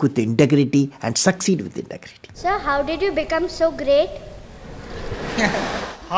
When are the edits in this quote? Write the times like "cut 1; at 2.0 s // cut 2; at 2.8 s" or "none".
cut 1; at 2.4 s